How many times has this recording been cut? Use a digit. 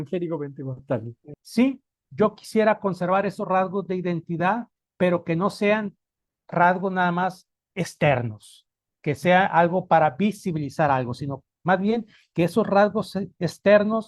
1